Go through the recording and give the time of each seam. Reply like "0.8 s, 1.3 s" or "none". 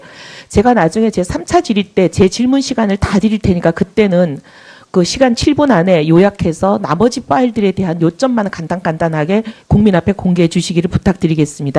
none

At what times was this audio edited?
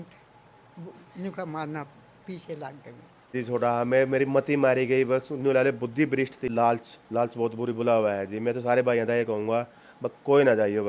3.3 s, 6.5 s

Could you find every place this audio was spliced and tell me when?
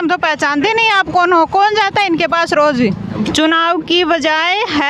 3.2 s

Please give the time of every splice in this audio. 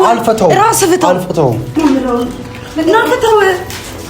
1.7 s

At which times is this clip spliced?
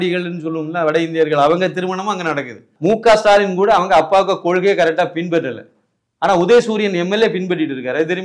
2.7 s

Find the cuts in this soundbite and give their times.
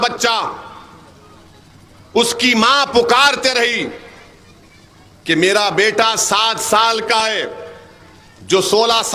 none

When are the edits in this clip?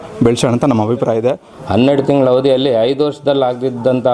1.5 s

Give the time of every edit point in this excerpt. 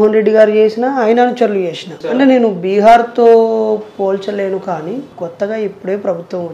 2.0 s, 5.1 s

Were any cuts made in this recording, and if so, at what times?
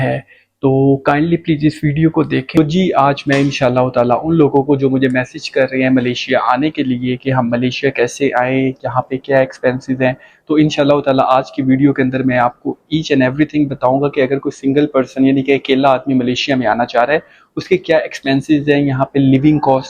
2.5 s

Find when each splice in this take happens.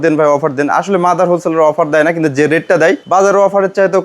3.0 s

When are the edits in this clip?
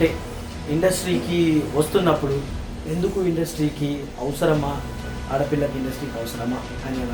none

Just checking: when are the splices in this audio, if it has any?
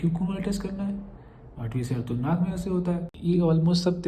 3.1 s

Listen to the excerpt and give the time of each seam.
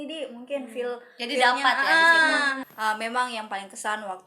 2.6 s

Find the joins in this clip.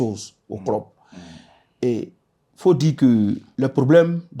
3.5 s

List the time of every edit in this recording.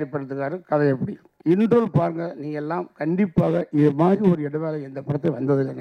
1.3 s

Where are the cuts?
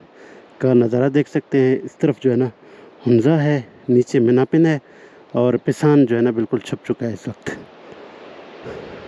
none

